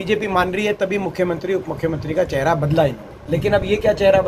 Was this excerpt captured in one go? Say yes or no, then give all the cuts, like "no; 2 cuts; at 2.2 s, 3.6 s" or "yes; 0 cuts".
no; 1 cut; at 3.1 s